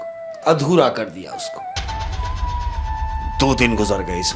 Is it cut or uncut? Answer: uncut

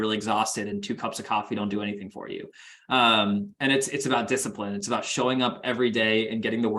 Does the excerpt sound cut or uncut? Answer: uncut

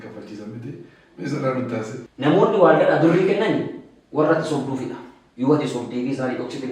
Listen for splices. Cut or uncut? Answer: cut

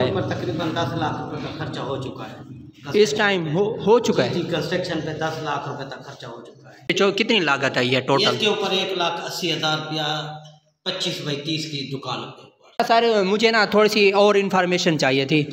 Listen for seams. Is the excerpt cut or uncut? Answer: cut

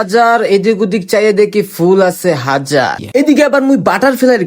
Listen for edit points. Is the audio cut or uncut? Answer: cut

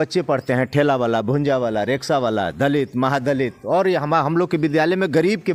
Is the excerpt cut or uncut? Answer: uncut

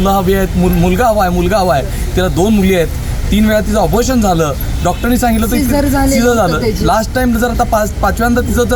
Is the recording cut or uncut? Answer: uncut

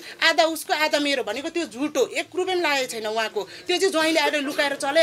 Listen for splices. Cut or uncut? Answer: uncut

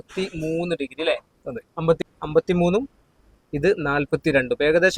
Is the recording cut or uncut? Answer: cut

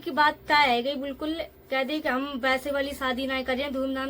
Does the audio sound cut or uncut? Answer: uncut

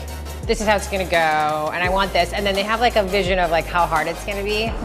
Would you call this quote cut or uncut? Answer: uncut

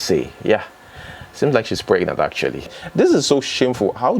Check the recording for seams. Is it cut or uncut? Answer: cut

